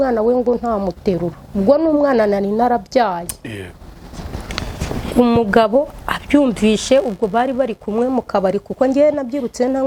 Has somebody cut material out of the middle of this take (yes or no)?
no